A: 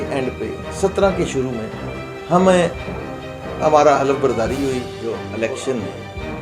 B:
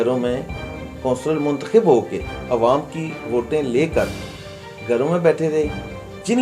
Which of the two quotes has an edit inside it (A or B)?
A